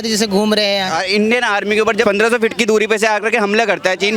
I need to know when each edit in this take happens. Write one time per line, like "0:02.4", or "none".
0:00.9
0:02.0